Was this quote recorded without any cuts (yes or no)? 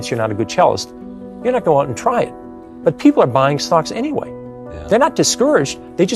yes